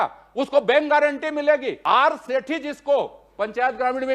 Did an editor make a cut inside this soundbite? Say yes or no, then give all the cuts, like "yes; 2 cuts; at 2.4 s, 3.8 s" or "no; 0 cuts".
yes; 1 cut; at 1.7 s